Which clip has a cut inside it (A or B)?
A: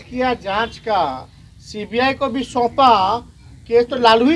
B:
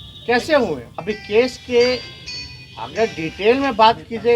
B